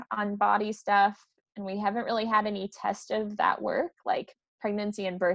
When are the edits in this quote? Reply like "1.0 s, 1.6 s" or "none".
none